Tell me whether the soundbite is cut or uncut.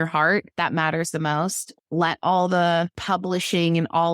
cut